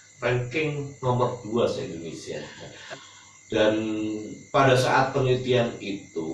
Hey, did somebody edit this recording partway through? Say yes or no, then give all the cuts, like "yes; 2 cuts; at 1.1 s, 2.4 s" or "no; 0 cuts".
yes; 1 cut; at 2.8 s